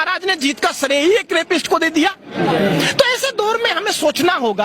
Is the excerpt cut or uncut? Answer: uncut